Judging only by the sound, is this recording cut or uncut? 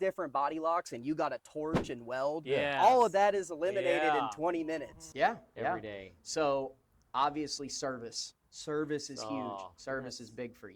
cut